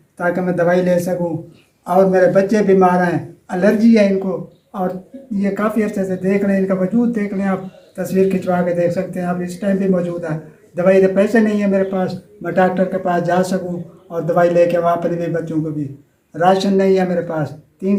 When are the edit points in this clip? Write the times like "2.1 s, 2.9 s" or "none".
none